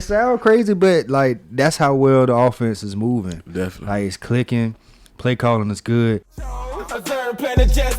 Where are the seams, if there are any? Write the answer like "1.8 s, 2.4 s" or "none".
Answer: 6.6 s